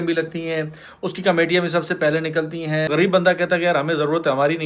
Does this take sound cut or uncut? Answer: cut